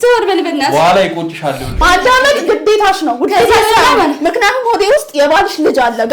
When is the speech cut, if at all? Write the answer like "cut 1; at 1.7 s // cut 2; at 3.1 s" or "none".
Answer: cut 1; at 1.8 s